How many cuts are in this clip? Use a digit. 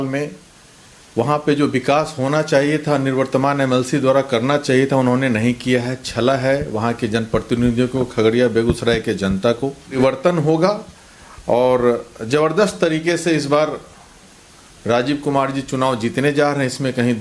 1